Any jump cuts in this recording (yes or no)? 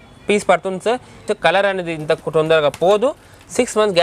yes